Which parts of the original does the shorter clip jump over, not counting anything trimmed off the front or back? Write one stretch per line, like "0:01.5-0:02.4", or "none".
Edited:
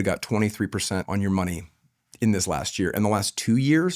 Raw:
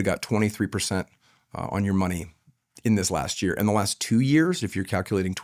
0:01.1-0:01.7